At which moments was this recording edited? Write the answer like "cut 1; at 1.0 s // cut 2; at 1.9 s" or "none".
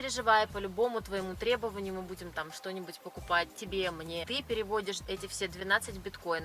cut 1; at 4.2 s // cut 2; at 5.0 s